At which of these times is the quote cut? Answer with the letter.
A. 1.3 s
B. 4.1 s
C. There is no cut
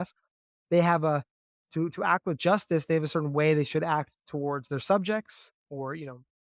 B